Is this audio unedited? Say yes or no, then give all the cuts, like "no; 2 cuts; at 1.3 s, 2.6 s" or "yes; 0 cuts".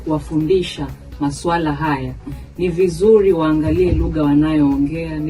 yes; 0 cuts